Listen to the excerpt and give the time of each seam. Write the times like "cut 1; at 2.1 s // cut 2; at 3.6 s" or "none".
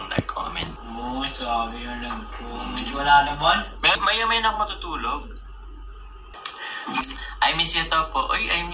cut 1; at 4.0 s